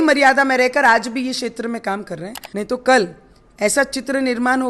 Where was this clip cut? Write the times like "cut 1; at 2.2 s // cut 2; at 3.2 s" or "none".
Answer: cut 1; at 2.4 s